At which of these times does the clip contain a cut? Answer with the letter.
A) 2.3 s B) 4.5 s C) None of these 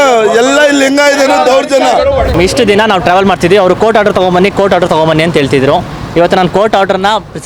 A